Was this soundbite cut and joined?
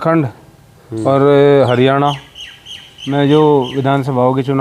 no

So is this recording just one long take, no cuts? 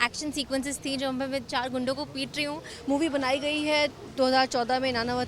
no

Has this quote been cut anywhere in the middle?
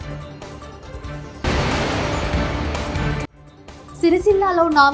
yes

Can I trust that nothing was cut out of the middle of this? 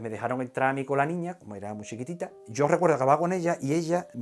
no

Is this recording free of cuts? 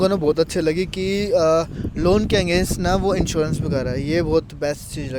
yes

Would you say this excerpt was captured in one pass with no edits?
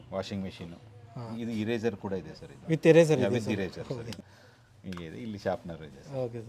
no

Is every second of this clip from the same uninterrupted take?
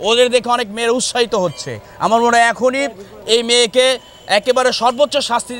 yes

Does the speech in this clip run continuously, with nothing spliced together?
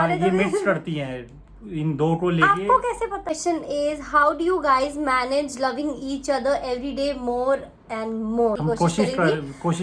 no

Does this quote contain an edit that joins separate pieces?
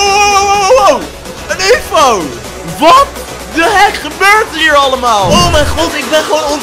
yes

